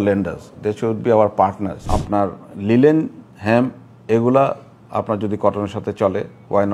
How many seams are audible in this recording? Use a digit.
1